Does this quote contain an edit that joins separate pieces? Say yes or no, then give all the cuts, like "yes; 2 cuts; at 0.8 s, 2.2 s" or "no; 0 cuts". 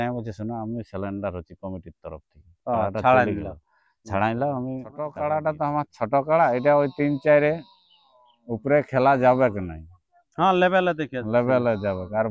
yes; 1 cut; at 5.0 s